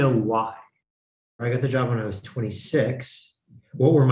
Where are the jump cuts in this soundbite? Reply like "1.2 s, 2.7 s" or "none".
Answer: 1.4 s